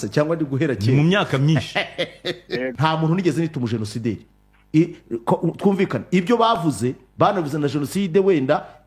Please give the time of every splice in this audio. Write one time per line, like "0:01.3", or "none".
0:02.7

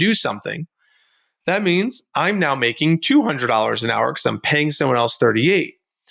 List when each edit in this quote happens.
none

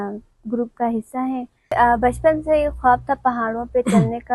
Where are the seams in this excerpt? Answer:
0:01.7

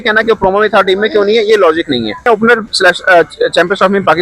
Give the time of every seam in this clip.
0:02.3

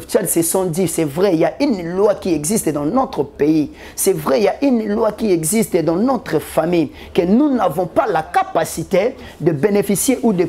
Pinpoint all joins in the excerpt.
none

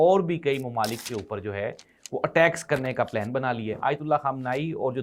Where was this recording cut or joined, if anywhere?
0:03.7

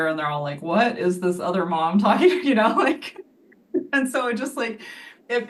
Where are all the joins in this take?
none

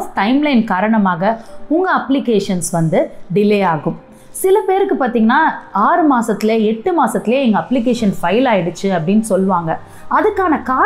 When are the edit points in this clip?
none

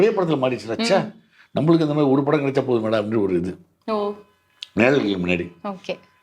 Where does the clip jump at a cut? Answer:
none

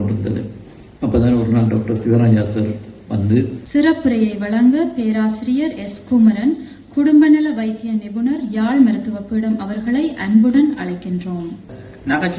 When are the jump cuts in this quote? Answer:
0:03.6
0:11.6

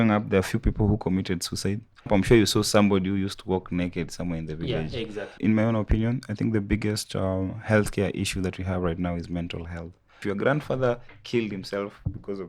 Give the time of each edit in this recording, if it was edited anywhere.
0:02.1
0:05.3
0:10.2

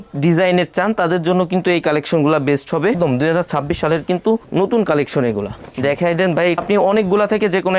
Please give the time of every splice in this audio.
0:03.0
0:06.6

